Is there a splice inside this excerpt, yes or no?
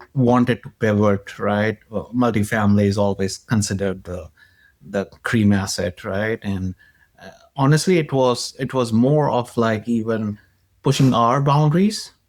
no